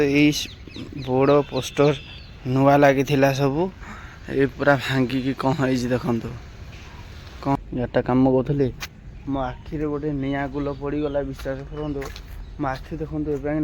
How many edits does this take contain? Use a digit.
1